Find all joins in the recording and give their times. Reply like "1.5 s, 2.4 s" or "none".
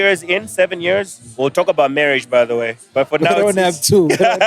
1.2 s, 2.8 s